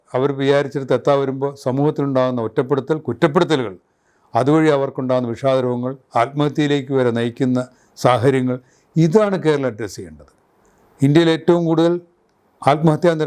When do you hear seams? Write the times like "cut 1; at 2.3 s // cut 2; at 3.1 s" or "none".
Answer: none